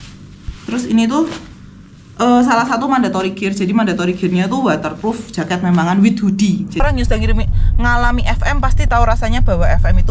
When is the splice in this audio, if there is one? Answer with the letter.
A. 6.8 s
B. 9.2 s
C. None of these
A